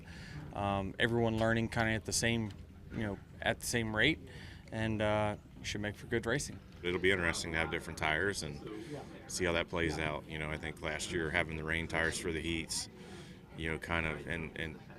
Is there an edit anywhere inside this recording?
yes; 1 cut; at 6.8 s

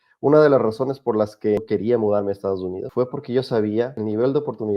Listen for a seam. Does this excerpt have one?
yes; 3 cuts; at 1.6 s, 2.8 s, 3.9 s

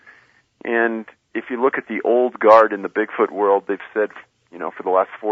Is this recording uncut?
yes; 0 cuts

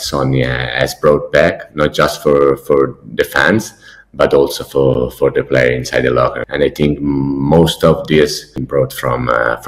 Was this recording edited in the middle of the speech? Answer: yes; 2 cuts; at 6.4 s, 8.5 s

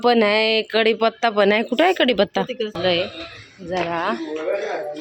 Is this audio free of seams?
no; 1 cut; at 2.8 s

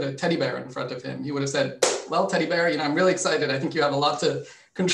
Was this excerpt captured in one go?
yes; 0 cuts

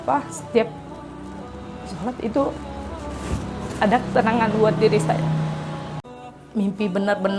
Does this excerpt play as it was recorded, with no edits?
no; 1 cut; at 6.0 s

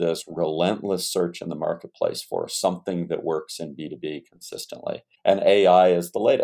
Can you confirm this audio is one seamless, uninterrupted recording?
no; 1 cut; at 5.1 s

